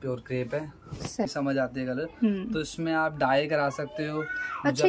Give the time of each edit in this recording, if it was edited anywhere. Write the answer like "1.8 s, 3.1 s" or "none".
1.3 s